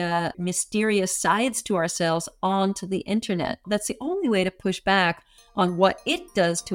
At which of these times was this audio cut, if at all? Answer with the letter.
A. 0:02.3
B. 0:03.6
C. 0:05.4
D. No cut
B